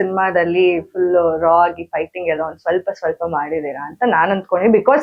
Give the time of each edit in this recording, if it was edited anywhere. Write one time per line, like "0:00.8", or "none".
none